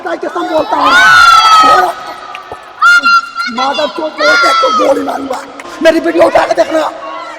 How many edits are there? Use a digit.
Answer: 1